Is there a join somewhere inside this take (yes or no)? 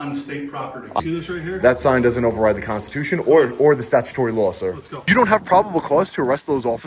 yes